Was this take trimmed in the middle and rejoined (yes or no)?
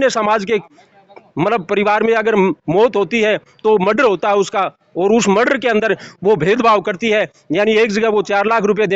no